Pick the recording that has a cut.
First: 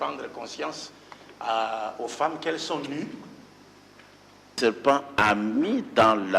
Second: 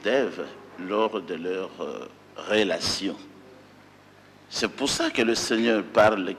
first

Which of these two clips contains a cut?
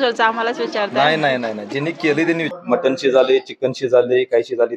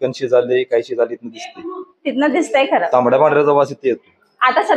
first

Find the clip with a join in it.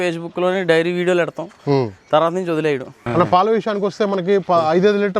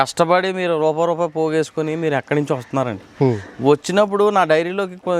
first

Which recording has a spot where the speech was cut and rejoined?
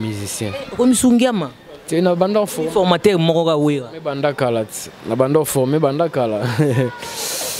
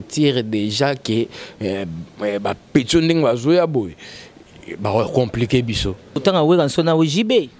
second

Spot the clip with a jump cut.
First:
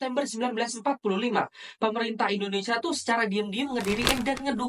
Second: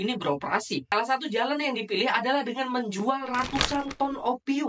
second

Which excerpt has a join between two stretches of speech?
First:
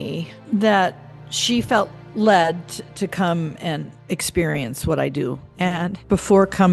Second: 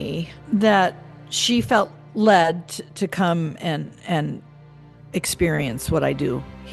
first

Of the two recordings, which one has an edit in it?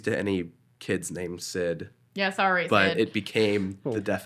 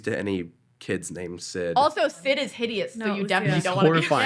second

